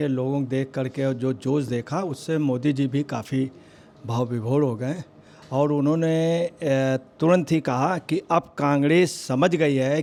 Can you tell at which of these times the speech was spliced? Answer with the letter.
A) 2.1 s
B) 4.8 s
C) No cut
C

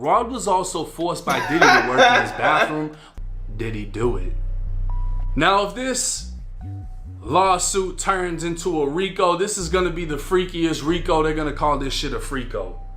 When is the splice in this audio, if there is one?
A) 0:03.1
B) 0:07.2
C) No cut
A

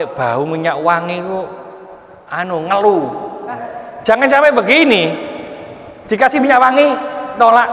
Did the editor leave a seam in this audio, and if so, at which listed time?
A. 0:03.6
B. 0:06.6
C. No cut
A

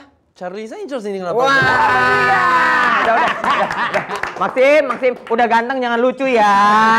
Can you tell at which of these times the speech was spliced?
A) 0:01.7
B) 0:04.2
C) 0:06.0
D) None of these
D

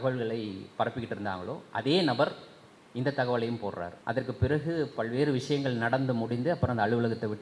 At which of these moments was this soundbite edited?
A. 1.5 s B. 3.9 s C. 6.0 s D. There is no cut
B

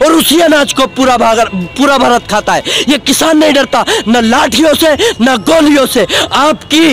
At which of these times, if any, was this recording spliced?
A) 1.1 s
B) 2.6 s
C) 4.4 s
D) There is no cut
D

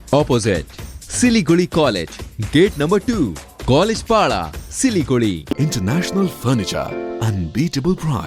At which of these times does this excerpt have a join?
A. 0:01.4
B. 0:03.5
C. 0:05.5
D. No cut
C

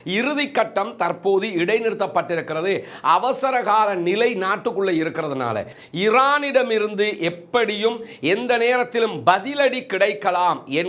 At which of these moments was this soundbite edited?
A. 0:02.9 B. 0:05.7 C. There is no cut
B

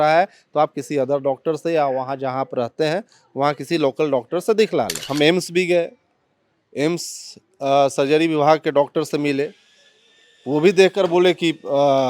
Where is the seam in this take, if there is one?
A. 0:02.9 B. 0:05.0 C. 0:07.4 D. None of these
B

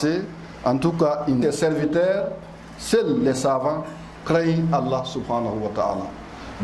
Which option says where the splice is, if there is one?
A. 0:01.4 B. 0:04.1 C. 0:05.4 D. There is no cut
A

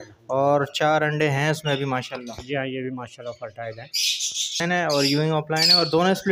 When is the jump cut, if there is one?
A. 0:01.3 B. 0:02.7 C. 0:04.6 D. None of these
C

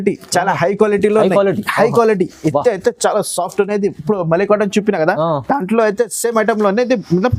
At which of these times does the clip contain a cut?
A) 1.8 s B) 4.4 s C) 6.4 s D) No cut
D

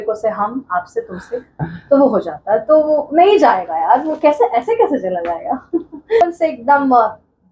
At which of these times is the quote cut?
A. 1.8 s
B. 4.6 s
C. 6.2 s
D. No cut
C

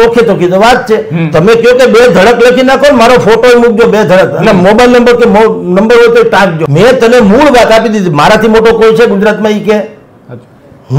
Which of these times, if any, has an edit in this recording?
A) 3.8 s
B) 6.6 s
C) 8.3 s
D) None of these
B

